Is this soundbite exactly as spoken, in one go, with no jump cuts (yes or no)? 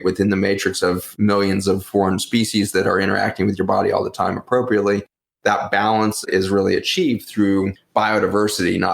no